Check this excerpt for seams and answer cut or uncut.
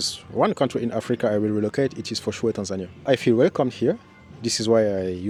uncut